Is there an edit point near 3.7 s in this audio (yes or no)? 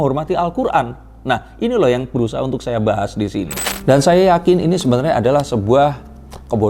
yes